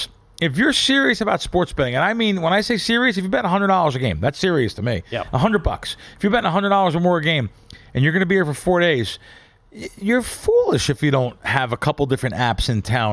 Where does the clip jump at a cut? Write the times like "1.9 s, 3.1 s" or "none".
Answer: none